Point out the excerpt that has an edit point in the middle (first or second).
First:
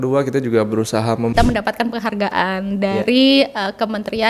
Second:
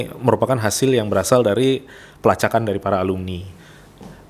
first